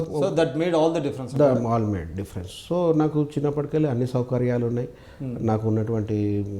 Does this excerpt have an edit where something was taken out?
no; 0 cuts

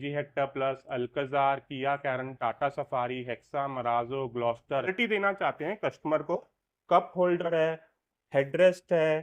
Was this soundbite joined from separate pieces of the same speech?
yes; 1 cut; at 4.9 s

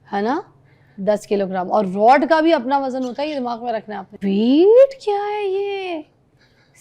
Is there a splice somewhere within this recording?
yes; 1 cut; at 4.0 s

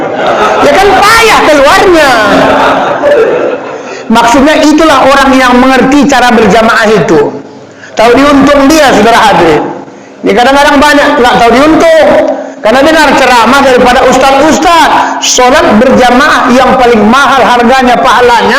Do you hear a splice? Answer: yes; 1 cut; at 3.0 s

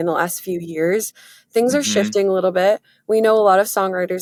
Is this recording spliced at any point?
no; 0 cuts

